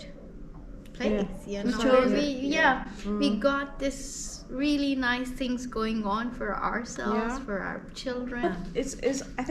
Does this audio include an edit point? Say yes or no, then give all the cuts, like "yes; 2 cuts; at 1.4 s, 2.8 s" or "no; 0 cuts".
yes; 1 cut; at 8.4 s